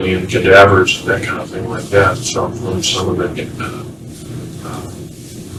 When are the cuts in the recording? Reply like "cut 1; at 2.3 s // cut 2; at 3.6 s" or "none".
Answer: none